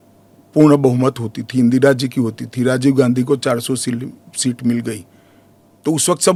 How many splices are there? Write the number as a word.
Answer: zero